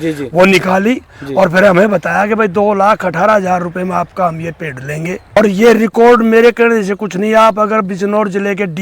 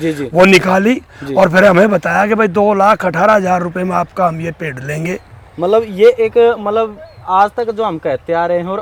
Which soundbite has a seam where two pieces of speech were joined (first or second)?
first